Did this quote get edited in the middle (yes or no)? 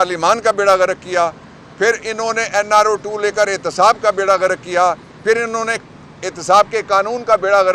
no